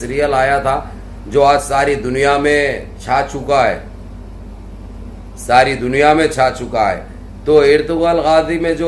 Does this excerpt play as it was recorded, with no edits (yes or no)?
yes